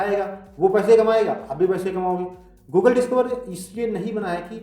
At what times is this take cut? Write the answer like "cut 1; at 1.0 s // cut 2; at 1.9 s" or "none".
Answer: none

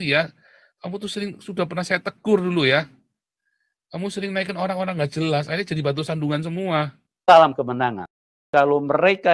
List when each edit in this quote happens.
cut 1; at 7.2 s

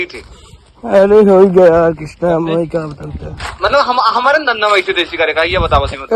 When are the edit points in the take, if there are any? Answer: none

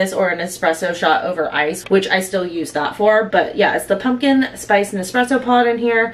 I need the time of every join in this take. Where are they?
none

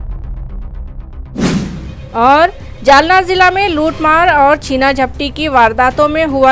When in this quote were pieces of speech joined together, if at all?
cut 1; at 1.5 s

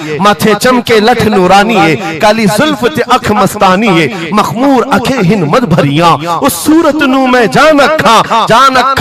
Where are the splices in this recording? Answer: none

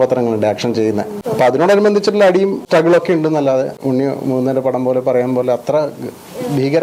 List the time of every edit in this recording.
cut 1; at 1.2 s // cut 2; at 3.8 s

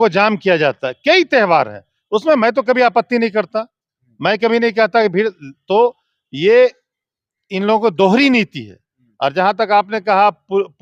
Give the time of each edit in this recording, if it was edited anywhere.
none

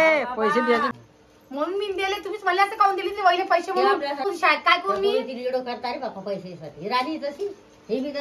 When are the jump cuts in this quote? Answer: cut 1; at 0.9 s // cut 2; at 4.2 s

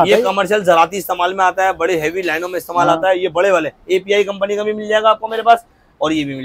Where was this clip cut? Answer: none

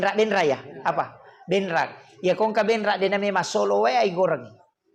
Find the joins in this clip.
none

